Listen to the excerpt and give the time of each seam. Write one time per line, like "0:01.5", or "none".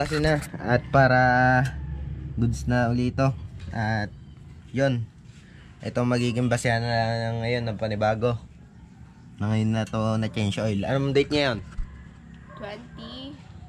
none